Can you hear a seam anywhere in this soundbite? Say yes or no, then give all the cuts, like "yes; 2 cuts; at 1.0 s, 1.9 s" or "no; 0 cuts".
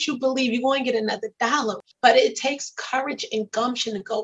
yes; 1 cut; at 1.8 s